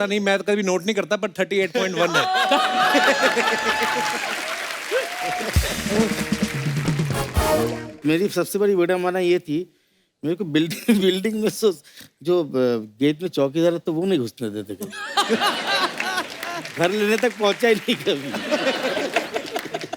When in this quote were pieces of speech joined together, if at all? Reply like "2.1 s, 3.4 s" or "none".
7.9 s